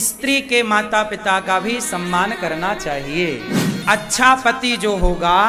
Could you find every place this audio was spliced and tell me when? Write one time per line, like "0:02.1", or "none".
0:03.7